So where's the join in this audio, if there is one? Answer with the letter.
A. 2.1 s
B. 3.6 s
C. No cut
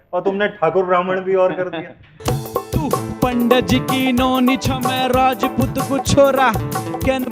A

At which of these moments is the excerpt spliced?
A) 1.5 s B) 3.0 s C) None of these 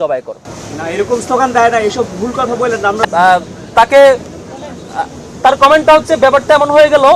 B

